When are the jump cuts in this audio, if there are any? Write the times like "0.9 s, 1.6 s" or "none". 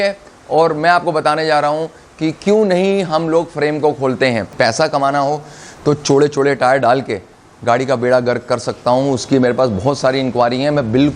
4.5 s